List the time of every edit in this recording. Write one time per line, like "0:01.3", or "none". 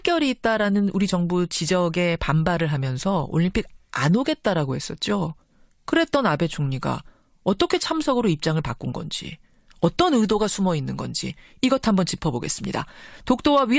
0:01.1